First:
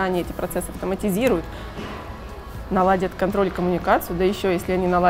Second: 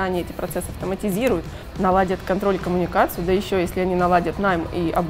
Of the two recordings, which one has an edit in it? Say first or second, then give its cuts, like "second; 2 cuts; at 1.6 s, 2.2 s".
second; 1 cut; at 1.6 s